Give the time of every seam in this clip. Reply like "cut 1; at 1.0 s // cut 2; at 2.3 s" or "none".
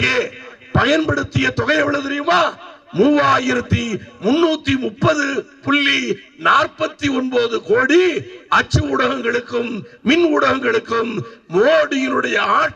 none